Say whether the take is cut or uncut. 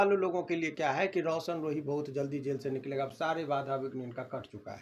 uncut